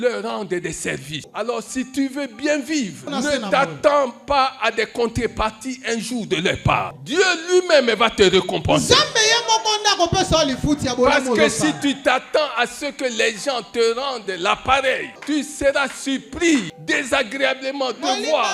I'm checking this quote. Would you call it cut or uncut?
cut